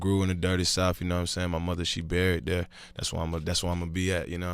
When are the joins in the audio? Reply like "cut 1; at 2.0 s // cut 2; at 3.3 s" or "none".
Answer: cut 1; at 3.3 s